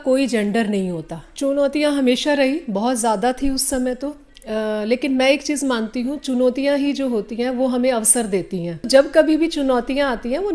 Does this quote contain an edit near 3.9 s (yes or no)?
no